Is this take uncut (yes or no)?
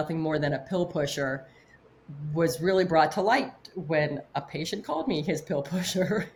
yes